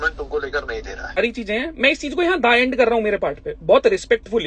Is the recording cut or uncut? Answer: cut